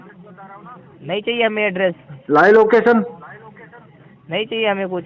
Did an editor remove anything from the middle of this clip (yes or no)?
no